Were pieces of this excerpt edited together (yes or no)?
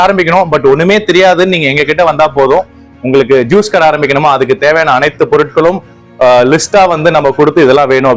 no